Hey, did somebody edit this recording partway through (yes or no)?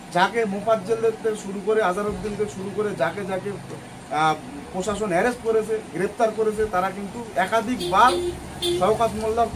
no